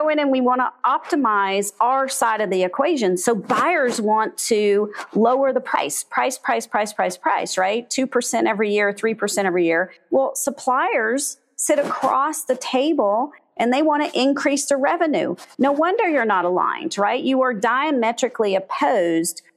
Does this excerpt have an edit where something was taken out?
no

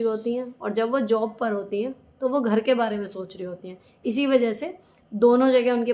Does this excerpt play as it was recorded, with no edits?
no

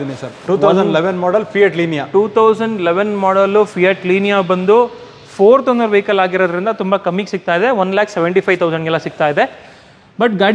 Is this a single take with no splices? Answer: yes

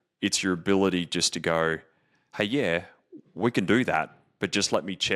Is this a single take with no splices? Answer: yes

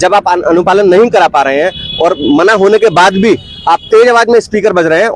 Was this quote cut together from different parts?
no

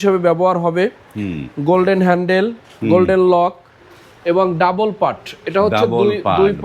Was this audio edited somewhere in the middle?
no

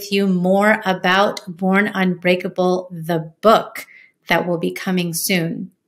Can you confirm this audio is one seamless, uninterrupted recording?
yes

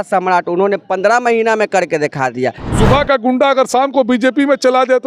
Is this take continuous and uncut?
no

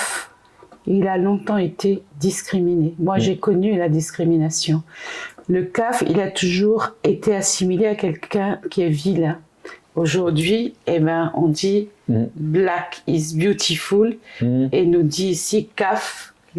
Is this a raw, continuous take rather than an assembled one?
yes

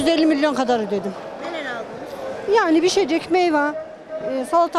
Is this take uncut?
yes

